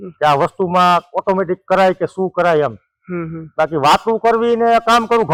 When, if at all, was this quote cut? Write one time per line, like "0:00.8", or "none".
none